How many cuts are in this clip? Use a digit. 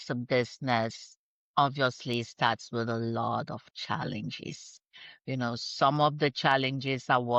0